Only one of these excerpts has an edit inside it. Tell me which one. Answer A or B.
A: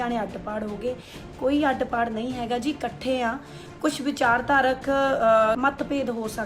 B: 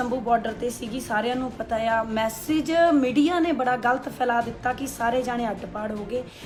A